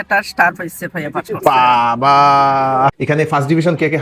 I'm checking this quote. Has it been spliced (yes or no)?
yes